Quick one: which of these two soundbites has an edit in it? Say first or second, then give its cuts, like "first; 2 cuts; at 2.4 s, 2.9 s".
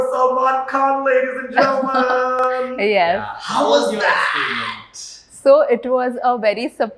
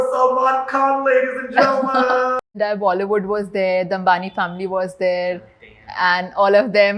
second; 1 cut; at 2.4 s